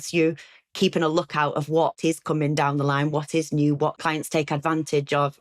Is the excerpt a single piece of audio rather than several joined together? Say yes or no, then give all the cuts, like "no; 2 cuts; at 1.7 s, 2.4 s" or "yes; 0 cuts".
no; 2 cuts; at 2.0 s, 4.0 s